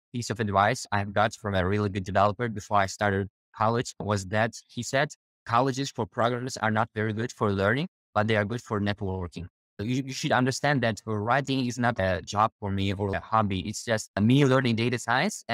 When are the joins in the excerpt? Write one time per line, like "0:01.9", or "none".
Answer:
0:09.8
0:12.0
0:13.1